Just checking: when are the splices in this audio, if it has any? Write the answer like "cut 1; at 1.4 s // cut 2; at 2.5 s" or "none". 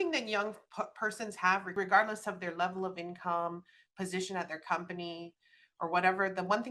cut 1; at 1.7 s